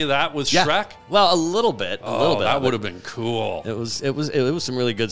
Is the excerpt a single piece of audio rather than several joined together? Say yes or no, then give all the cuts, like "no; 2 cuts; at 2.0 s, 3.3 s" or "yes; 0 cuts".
yes; 0 cuts